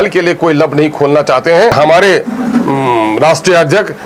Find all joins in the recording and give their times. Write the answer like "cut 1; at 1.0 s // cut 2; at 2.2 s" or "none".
cut 1; at 1.7 s